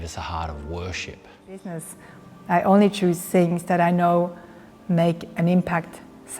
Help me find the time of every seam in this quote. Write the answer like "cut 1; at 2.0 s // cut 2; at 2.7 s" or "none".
cut 1; at 1.9 s

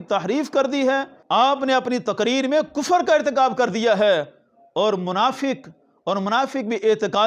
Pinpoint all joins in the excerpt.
cut 1; at 1.2 s

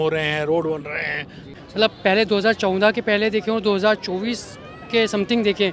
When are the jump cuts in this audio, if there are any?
cut 1; at 1.5 s

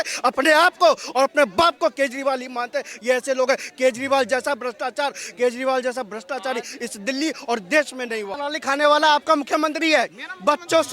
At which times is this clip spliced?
cut 1; at 8.3 s

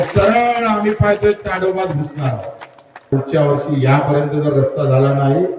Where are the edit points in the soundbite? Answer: cut 1; at 3.1 s

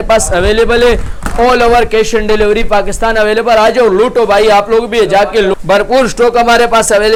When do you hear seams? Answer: none

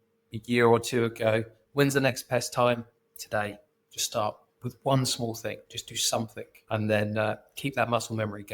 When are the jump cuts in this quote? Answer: cut 1; at 6.5 s

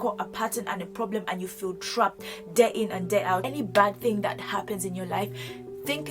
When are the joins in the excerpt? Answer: cut 1; at 3.5 s

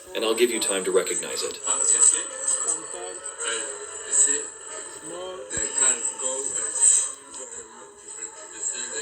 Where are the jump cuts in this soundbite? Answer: cut 1; at 6.5 s

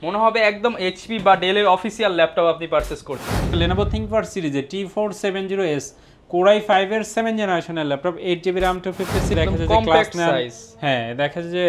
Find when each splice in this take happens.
cut 1; at 3.5 s // cut 2; at 9.3 s

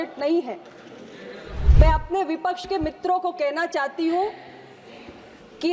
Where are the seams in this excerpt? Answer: cut 1; at 1.6 s

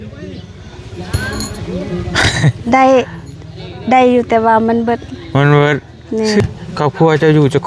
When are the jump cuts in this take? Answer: cut 1; at 6.4 s

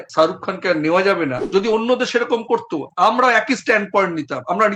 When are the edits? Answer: cut 1; at 1.4 s

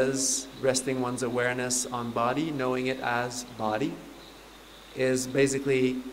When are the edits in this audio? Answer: none

